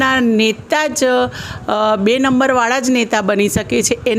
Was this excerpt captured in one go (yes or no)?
yes